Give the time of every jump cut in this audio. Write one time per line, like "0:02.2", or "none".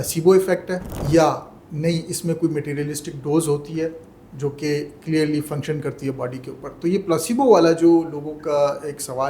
0:00.9